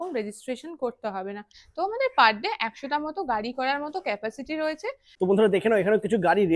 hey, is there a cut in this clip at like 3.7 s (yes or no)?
no